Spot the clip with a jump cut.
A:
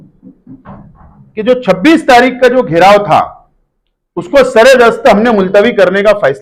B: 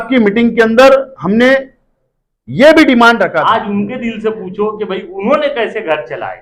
B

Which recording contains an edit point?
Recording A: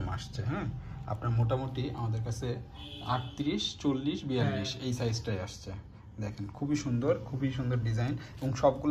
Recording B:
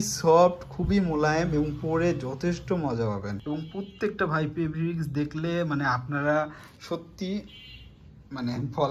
B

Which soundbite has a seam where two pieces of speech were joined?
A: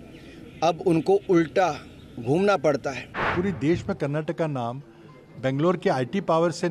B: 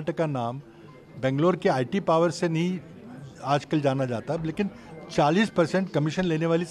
A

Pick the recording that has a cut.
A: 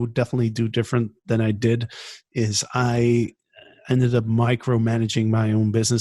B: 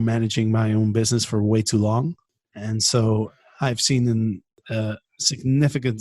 B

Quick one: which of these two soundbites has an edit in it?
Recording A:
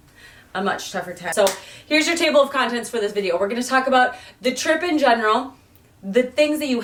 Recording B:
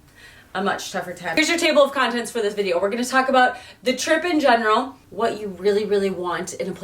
B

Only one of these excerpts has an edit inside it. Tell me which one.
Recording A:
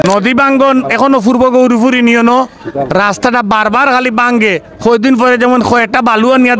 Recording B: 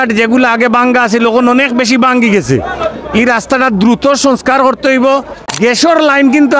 B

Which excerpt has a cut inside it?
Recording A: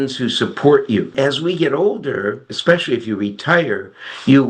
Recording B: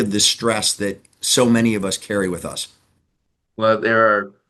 A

